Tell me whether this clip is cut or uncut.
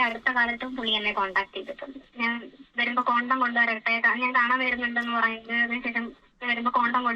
uncut